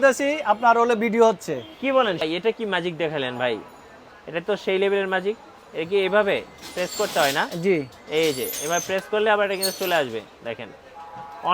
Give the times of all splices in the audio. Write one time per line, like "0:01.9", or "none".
0:02.2